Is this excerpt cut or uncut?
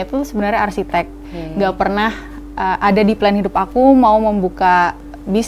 cut